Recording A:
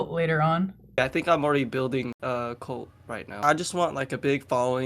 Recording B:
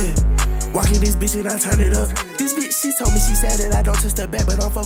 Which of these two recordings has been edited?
A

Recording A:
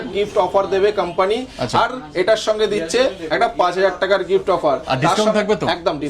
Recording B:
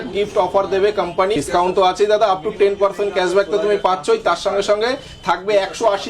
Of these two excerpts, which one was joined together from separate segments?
B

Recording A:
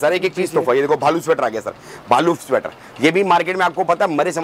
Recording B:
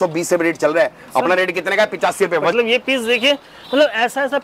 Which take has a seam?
B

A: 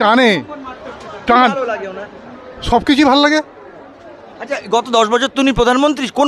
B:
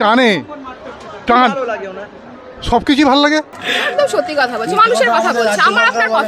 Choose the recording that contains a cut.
B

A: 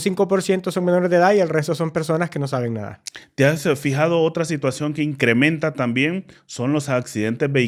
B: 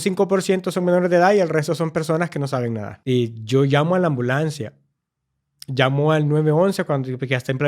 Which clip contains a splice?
B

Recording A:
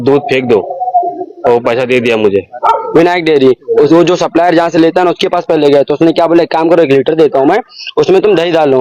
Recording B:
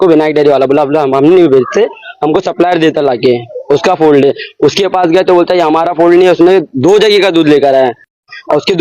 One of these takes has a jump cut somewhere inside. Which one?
A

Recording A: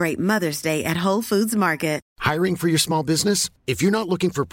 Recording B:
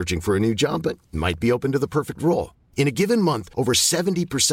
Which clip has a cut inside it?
A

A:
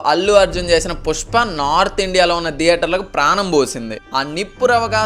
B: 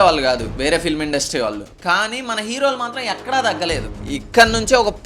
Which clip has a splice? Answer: B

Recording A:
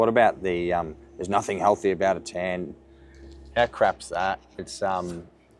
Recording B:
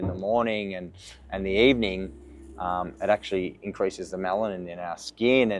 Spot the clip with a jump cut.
A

